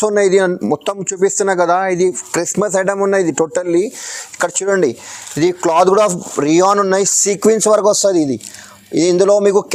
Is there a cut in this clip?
no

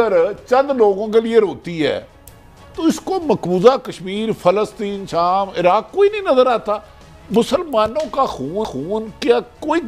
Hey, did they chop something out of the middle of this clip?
no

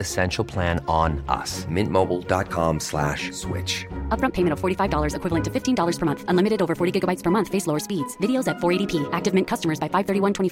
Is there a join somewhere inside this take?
no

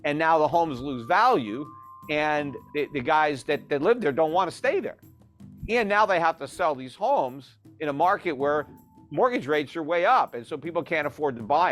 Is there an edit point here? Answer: yes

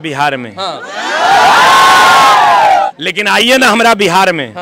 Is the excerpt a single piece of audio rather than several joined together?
no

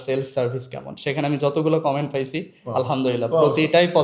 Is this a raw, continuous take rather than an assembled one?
yes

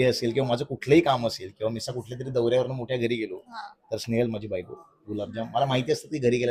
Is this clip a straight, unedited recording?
yes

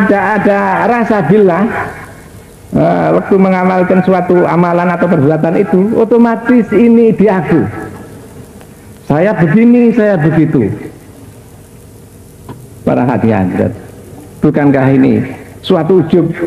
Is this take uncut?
yes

